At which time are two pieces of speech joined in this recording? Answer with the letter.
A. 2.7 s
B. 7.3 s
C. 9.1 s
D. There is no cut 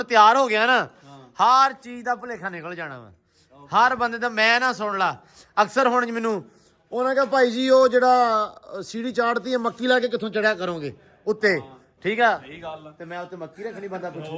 D